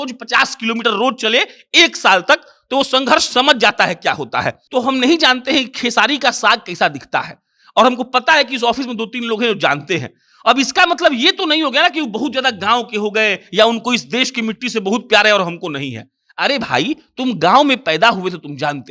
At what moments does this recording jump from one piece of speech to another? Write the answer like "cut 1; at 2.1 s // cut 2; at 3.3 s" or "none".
cut 1; at 4.6 s